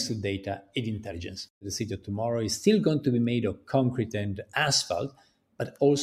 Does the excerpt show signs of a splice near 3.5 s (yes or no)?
no